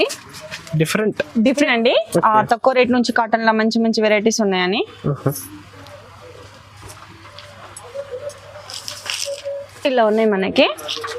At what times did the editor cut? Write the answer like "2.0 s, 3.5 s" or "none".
1.6 s